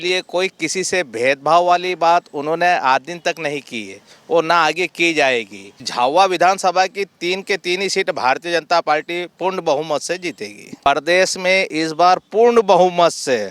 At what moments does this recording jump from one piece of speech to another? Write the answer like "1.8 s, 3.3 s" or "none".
5.9 s, 10.9 s

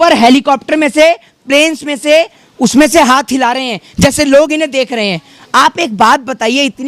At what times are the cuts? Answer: none

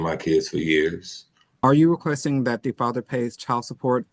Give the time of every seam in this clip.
1.5 s

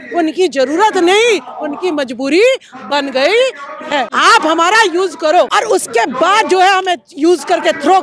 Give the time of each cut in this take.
4.1 s, 5.5 s

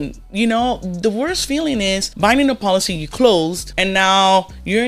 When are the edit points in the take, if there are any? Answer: 2.1 s, 3.7 s

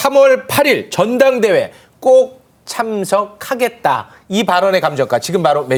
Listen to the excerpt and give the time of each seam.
none

